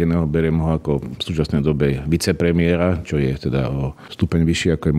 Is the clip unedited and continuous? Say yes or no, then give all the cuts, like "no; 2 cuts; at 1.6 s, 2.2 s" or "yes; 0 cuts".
no; 2 cuts; at 1.2 s, 4.0 s